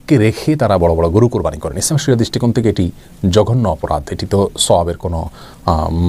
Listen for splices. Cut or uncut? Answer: uncut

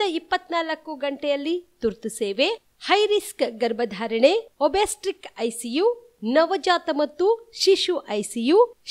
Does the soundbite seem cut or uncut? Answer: uncut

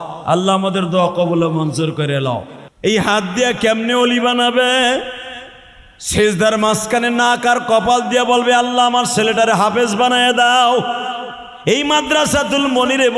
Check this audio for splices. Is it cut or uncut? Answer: cut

